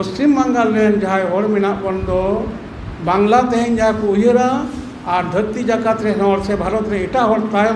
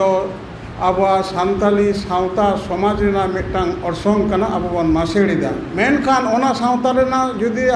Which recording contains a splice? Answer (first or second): second